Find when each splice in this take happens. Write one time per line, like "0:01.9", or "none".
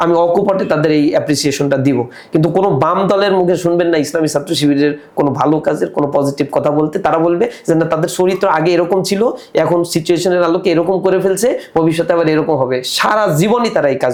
none